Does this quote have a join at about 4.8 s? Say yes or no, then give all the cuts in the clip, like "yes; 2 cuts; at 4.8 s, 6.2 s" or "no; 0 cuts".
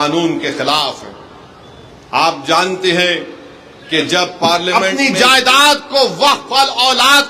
yes; 1 cut; at 4.8 s